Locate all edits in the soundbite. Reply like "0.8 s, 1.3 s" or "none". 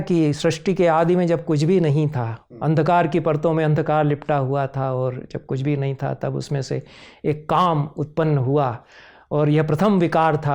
none

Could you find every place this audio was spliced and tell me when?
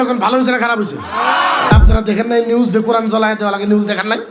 1.7 s

